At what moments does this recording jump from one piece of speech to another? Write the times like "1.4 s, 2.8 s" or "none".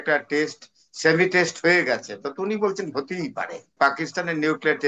3.7 s